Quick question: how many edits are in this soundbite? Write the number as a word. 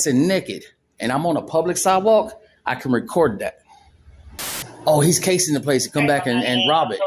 one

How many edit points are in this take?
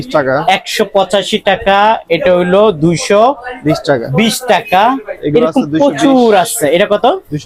zero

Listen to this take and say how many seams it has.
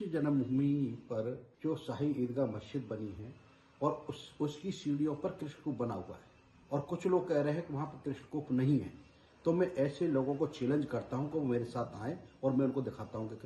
one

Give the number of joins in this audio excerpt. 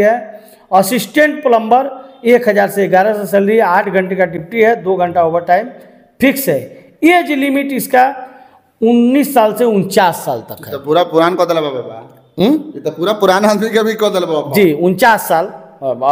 zero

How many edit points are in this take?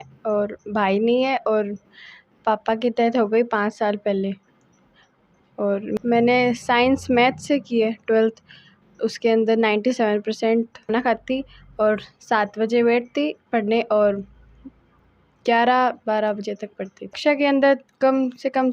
three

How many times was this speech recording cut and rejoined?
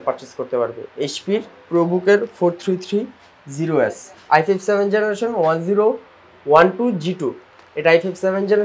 one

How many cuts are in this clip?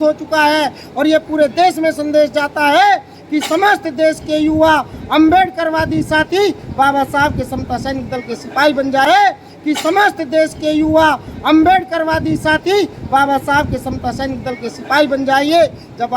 one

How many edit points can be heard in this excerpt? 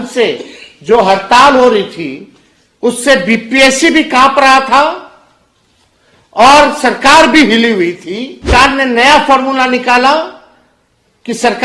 one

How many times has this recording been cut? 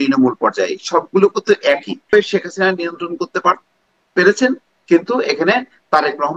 one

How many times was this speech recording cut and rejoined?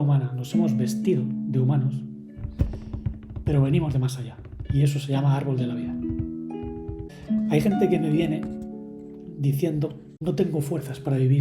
two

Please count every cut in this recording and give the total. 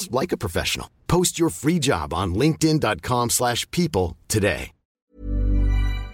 one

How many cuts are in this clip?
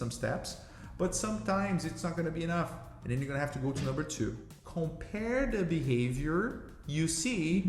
one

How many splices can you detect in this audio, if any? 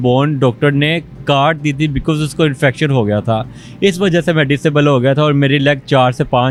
zero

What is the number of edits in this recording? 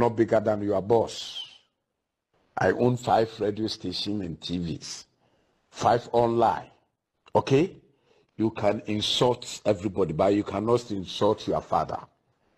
zero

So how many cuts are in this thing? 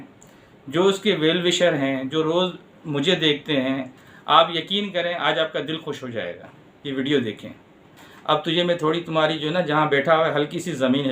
one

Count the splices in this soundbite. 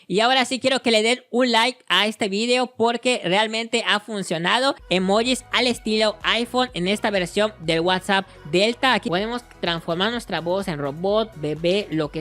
two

